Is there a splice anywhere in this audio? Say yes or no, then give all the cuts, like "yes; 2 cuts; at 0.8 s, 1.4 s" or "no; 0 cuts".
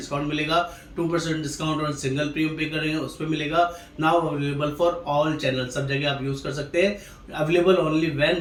no; 0 cuts